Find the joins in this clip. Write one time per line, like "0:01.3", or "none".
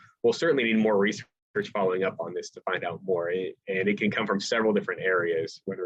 none

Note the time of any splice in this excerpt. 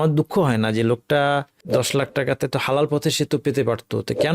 0:01.6

